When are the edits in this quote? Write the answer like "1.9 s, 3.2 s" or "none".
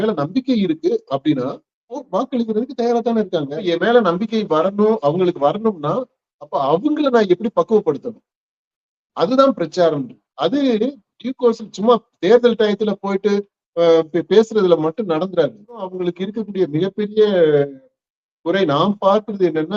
3.6 s, 16.0 s